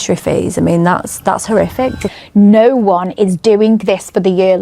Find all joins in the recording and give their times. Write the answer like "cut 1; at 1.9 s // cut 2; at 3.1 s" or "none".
cut 1; at 2.1 s